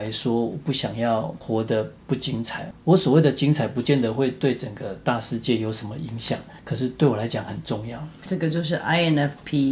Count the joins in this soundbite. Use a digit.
3